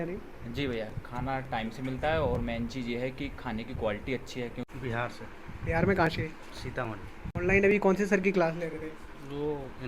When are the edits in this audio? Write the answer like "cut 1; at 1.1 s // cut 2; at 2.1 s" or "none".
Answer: cut 1; at 4.7 s